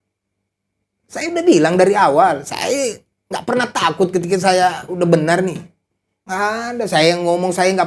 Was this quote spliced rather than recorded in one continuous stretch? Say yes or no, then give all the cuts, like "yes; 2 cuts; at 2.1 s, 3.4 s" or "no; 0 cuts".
no; 0 cuts